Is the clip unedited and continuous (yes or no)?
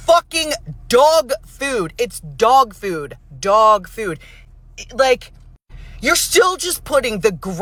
yes